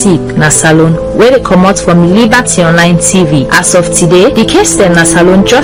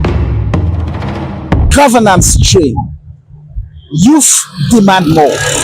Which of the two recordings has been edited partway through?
second; 1 cut; at 1.6 s

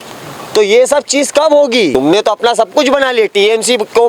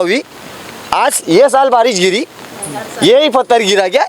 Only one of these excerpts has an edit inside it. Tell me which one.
first; 1 cut; at 1.9 s

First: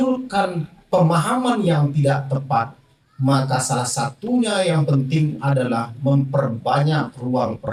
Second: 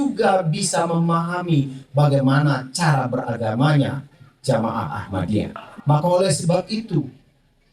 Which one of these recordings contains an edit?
second; 1 cut; at 5.7 s

